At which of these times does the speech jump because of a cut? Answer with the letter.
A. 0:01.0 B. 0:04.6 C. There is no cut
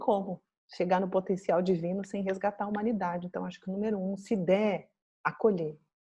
C